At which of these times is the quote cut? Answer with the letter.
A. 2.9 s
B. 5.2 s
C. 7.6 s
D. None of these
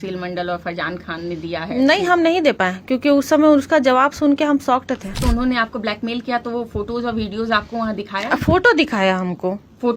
B